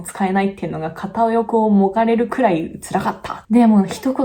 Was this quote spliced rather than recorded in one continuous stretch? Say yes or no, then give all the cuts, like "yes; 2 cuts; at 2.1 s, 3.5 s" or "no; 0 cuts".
yes; 1 cut; at 3.3 s